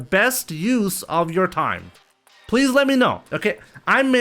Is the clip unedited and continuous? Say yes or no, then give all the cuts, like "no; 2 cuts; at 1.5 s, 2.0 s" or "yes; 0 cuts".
yes; 0 cuts